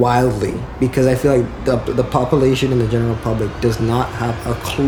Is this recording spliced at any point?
no; 0 cuts

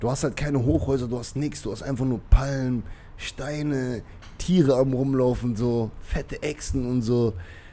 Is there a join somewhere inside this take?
no; 0 cuts

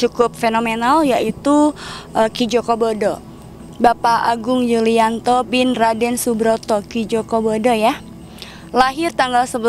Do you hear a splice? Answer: no; 0 cuts

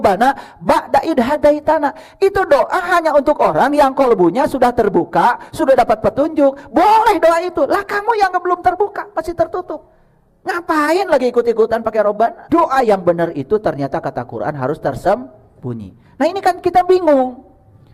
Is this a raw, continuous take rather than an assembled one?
no; 1 cut; at 12.4 s

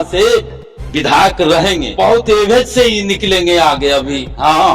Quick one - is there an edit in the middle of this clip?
no; 0 cuts

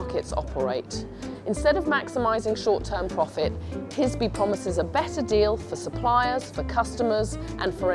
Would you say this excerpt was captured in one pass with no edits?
no; 1 cut; at 4.0 s

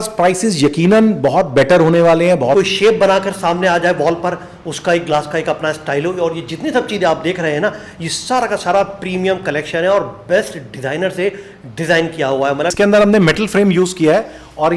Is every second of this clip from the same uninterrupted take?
no; 2 cuts; at 2.5 s, 12.7 s

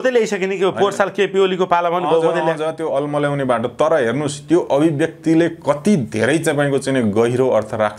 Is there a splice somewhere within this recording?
no; 0 cuts

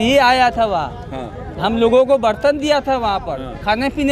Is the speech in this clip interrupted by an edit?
no; 0 cuts

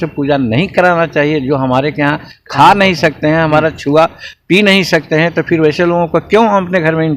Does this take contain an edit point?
no; 0 cuts

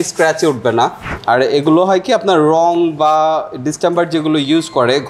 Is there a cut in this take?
yes; 1 cut; at 1.1 s

